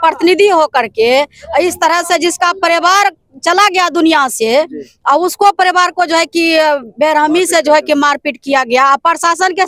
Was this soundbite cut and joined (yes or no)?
no